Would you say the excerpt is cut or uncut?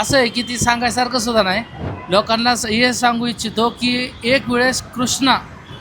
cut